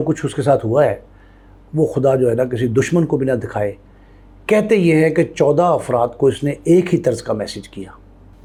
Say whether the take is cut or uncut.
uncut